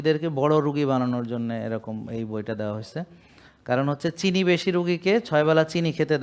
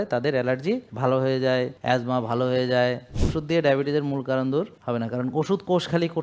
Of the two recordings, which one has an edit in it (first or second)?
second